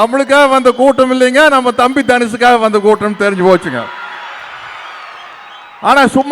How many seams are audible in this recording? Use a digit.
0